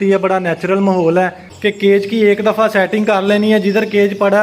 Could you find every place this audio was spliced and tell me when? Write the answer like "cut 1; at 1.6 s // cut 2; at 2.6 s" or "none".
cut 1; at 1.4 s